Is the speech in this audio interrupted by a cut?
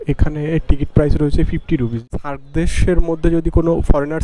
yes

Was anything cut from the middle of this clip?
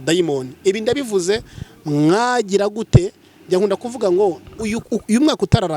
yes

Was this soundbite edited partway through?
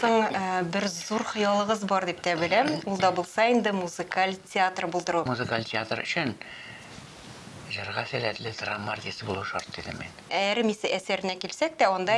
yes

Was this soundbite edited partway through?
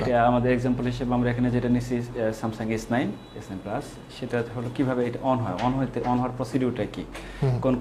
no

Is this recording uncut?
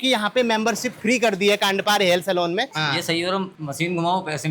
no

